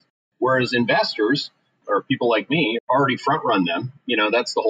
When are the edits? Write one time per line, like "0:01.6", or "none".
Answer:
0:01.8
0:02.8